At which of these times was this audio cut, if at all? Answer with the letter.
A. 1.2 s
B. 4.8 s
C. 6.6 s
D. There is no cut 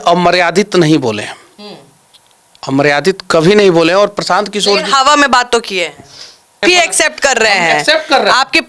C